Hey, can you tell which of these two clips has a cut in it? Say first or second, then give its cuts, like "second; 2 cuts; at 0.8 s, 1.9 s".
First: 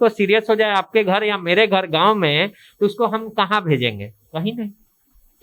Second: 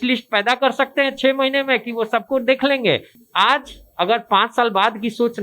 second; 1 cut; at 3.1 s